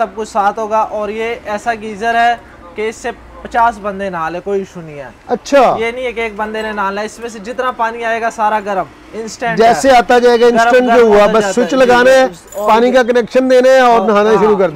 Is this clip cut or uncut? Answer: uncut